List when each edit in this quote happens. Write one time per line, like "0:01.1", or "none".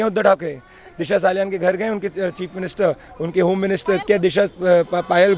none